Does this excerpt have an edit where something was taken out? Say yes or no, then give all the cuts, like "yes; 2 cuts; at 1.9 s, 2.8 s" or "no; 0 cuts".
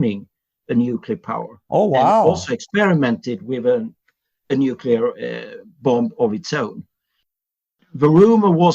yes; 1 cut; at 7.5 s